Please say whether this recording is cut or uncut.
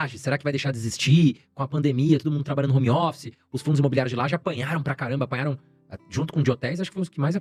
uncut